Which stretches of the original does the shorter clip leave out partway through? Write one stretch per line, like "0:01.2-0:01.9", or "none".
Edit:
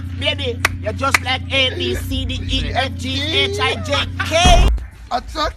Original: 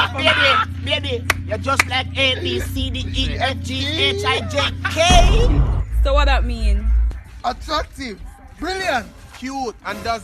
0:05.3-0:07.0